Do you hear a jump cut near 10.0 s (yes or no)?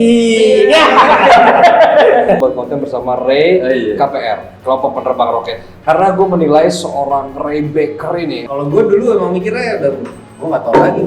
no